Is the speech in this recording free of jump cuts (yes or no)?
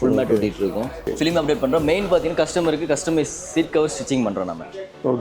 no